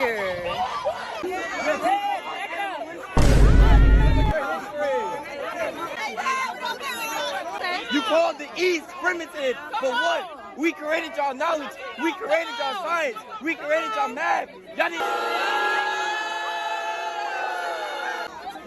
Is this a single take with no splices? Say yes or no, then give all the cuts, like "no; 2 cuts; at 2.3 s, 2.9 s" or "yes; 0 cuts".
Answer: no; 1 cut; at 15.0 s